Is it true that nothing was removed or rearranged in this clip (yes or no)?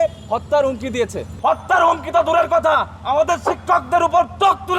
no